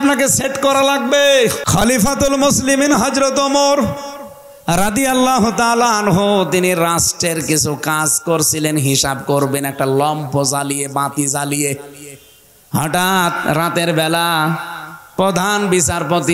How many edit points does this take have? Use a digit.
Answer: 1